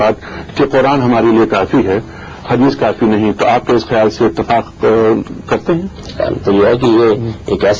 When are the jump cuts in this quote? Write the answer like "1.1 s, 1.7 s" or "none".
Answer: none